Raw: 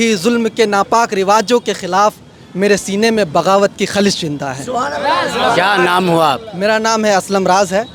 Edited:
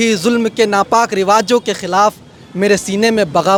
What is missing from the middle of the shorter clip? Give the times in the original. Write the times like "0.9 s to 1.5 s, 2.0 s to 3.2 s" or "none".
none